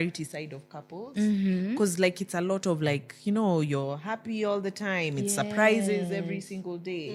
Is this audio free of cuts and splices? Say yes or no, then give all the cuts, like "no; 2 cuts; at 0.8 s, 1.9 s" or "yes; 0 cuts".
yes; 0 cuts